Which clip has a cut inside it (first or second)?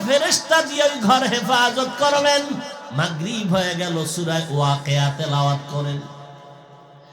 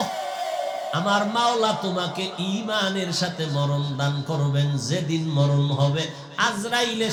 first